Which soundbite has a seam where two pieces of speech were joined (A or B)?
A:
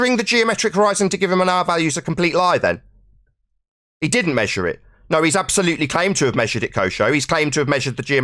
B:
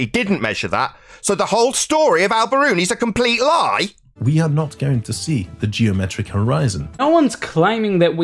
B